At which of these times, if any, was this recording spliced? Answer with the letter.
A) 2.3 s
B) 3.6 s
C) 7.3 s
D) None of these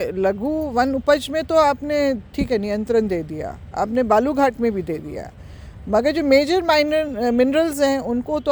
D